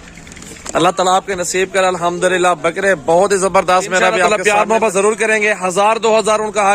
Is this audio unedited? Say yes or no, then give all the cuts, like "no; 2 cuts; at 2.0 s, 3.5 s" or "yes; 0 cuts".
no; 1 cut; at 4.2 s